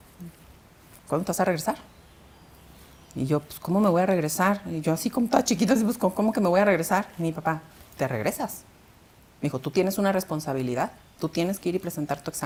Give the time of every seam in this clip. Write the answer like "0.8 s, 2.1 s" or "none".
none